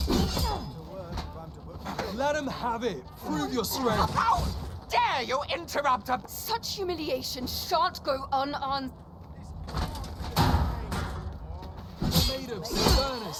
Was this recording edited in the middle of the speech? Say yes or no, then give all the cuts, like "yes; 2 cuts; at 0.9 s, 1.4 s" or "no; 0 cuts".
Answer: no; 0 cuts